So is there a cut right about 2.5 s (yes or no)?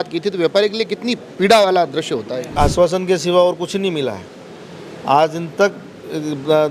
yes